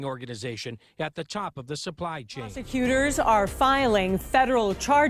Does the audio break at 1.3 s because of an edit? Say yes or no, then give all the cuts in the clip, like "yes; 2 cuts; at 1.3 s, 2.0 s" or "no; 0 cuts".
no; 1 cut; at 2.6 s